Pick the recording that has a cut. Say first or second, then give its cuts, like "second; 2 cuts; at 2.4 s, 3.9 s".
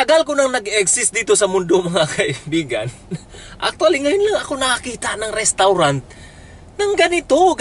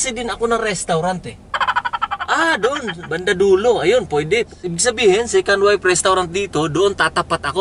second; 1 cut; at 4.5 s